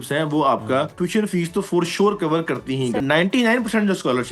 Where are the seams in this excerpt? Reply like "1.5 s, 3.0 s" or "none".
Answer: 0.9 s, 3.0 s

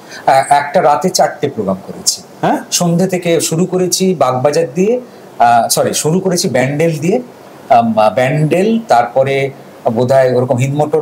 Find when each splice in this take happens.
none

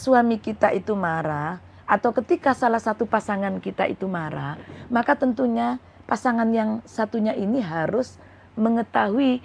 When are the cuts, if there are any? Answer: none

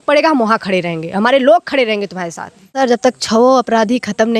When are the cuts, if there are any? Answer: 2.7 s

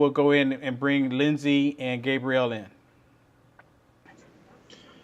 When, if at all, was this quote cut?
2.2 s

